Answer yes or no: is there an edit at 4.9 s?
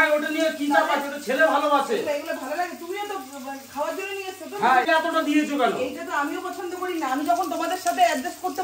yes